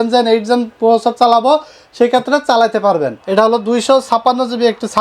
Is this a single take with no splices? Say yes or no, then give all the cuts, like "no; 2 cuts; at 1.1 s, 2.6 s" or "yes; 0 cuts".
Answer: no; 1 cut; at 3.2 s